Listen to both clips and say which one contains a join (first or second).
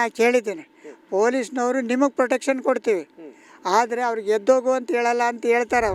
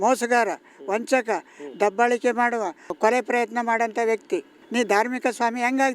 second